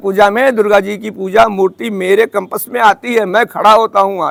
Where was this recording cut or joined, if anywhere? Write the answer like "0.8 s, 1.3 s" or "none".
none